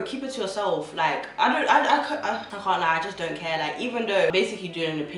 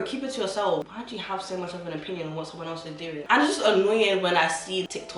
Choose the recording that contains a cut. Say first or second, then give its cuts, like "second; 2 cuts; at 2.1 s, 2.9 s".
second; 2 cuts; at 0.9 s, 3.2 s